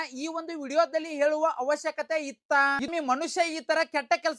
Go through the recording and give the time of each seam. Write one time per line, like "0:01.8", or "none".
0:02.9